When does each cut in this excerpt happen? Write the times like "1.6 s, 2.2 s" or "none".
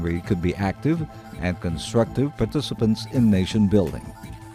3.6 s

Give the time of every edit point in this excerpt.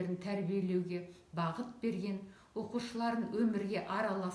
none

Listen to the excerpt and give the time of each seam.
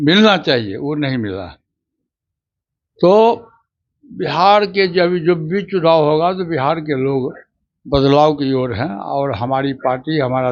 none

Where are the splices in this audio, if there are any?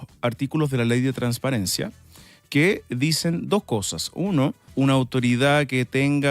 4.7 s

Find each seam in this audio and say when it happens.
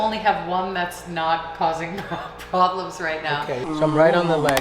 3.7 s

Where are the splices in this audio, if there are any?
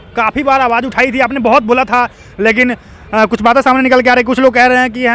none

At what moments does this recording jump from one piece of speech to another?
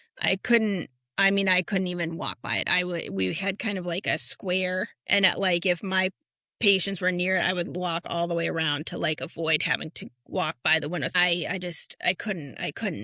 11.2 s

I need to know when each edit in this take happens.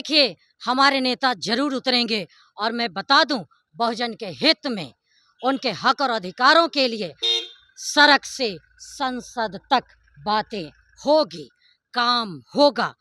none

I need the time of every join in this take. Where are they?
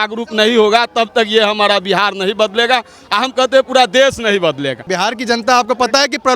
4.9 s

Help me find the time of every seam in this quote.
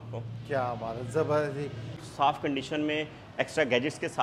2.1 s

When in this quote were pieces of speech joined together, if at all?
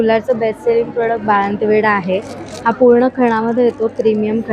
none

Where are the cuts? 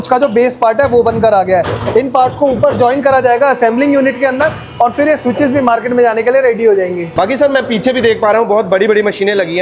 none

